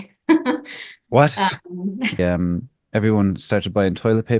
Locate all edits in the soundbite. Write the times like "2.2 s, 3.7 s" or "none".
2.2 s